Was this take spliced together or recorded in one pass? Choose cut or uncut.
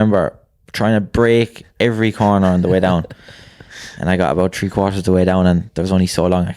uncut